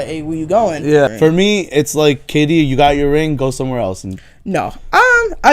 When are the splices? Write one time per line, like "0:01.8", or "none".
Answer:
0:01.1